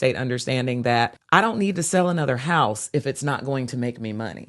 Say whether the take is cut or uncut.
cut